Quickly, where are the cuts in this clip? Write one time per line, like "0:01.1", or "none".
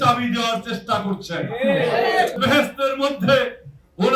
0:02.4

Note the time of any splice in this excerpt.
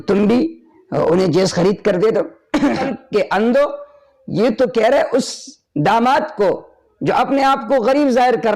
0:02.8

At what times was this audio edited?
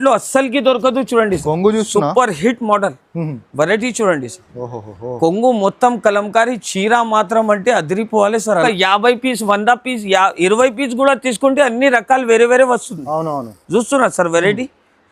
0:08.6

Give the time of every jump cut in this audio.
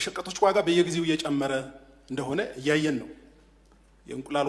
none

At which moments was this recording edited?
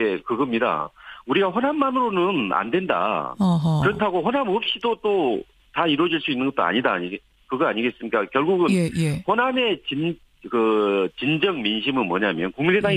none

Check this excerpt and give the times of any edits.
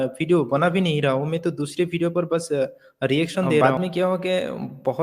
0:03.6

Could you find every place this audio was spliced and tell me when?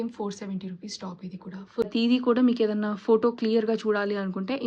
0:01.9

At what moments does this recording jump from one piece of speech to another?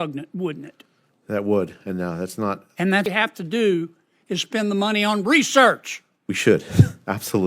0:03.1

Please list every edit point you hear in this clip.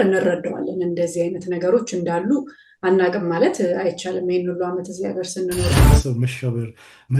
0:05.7

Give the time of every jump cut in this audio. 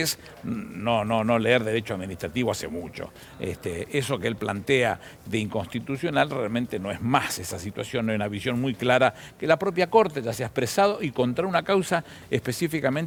none

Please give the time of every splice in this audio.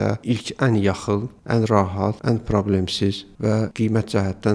0:01.3
0:02.2
0:03.4

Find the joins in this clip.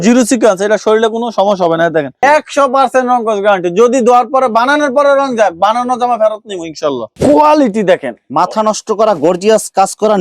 0:02.2
0:07.1

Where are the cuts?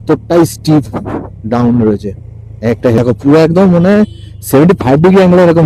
0:03.0

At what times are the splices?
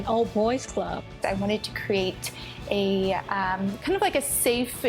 0:01.1

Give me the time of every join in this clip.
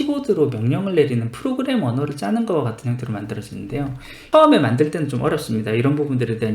0:04.2

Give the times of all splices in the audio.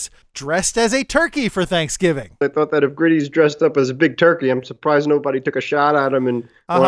0:02.4

